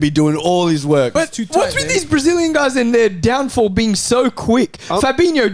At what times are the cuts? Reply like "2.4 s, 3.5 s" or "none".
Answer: 1.1 s